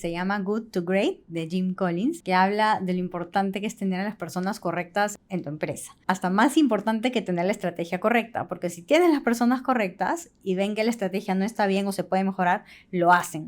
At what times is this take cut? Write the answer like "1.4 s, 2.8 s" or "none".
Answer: 2.2 s, 5.2 s